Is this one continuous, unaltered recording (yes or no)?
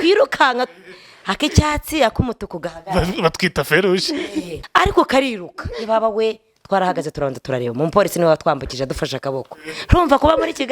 no